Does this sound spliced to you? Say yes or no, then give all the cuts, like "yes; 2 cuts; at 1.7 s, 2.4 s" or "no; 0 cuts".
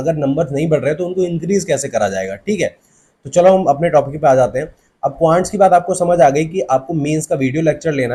no; 0 cuts